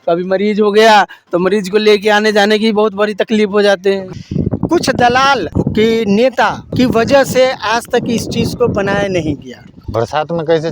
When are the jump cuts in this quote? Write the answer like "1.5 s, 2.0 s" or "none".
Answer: 4.1 s, 5.5 s, 6.7 s, 9.8 s